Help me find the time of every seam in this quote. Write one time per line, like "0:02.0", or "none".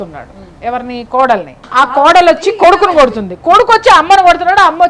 0:01.6